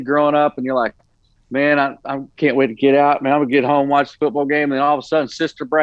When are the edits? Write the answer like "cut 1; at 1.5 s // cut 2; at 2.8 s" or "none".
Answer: none